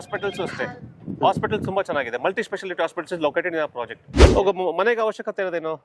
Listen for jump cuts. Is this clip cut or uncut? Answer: cut